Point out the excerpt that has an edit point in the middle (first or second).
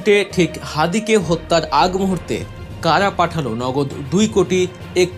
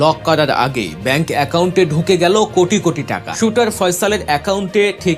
second